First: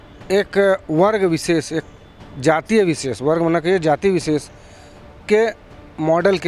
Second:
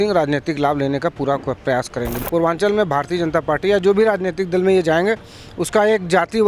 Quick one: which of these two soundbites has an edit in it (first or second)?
second